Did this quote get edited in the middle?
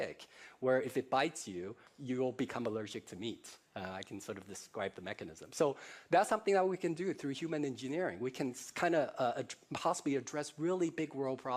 no; 0 cuts

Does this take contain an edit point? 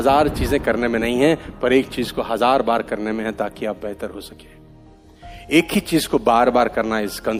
no; 0 cuts

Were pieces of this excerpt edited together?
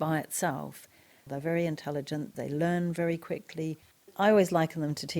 yes; 3 cuts; at 1.3 s, 2.3 s, 4.0 s

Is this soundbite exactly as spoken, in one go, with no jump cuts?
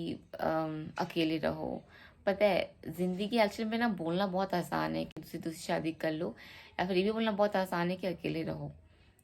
yes; 0 cuts

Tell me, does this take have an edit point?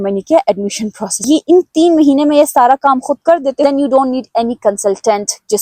yes; 2 cuts; at 1.2 s, 3.6 s

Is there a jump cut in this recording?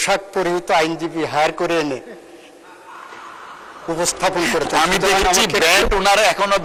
no; 0 cuts

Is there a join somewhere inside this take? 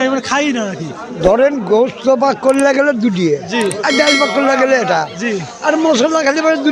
no; 0 cuts

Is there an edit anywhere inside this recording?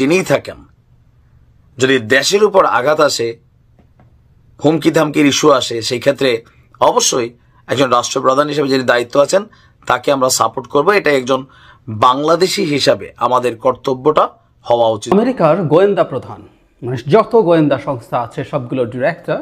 yes; 1 cut; at 15.1 s

